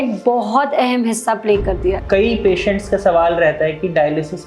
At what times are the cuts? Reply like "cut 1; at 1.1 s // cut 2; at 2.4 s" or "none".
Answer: cut 1; at 2.0 s